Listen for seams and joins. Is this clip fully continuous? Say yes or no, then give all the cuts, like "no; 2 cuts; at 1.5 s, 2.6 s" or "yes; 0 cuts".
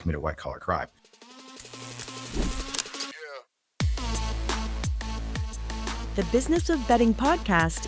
no; 2 cuts; at 1.1 s, 6.1 s